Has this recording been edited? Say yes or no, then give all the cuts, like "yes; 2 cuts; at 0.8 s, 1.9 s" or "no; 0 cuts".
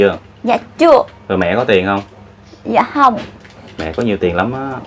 no; 0 cuts